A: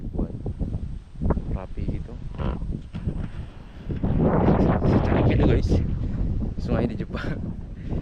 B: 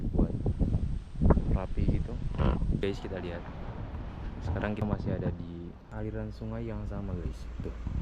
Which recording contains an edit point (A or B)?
B